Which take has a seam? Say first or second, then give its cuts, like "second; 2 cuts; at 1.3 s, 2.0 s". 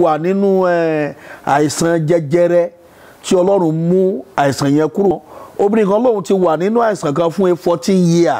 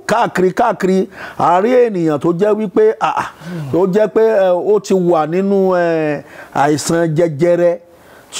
first; 1 cut; at 5.2 s